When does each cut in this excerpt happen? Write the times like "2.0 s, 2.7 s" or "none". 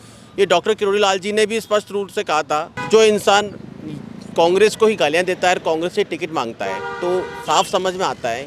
2.8 s